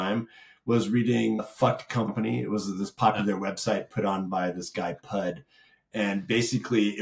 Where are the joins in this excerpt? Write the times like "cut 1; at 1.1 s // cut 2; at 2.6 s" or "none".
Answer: cut 1; at 1.9 s

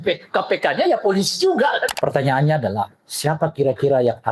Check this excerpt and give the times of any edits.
cut 1; at 1.9 s

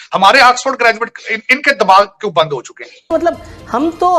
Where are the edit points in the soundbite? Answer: cut 1; at 3.1 s

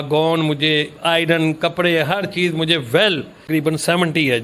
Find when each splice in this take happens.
cut 1; at 3.3 s

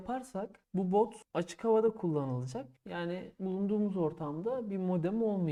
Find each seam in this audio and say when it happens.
none

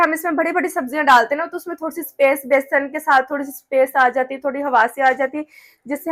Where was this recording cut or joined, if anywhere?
none

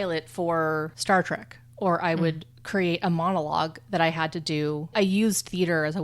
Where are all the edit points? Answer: cut 1; at 0.9 s // cut 2; at 4.9 s

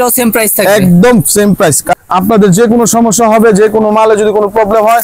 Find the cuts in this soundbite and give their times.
cut 1; at 1.8 s

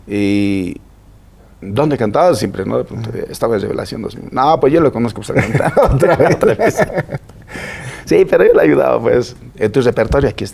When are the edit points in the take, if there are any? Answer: none

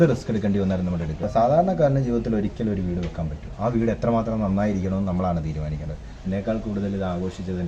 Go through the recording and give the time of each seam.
cut 1; at 1.3 s // cut 2; at 6.0 s

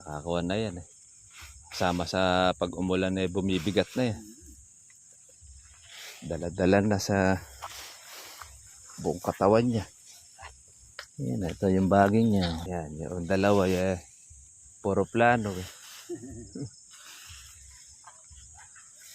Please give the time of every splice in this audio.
cut 1; at 12.6 s

